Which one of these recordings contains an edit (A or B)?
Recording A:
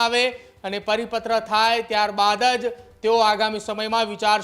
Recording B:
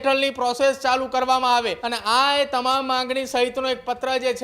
B